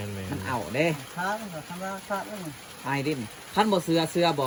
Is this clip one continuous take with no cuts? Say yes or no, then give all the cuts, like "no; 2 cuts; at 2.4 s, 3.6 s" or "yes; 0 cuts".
yes; 0 cuts